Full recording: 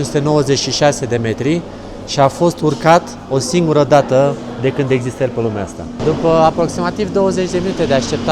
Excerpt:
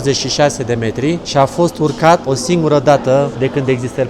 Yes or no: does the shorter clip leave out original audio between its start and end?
yes